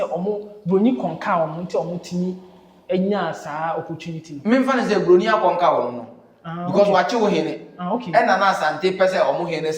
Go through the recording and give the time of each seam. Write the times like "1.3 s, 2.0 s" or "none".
none